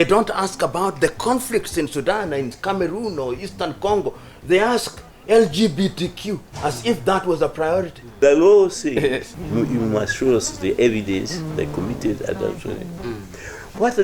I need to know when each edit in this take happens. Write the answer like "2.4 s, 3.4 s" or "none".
8.0 s, 9.3 s